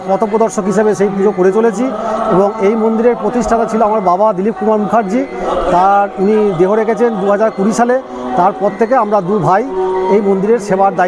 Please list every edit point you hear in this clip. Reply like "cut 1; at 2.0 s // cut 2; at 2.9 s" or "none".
none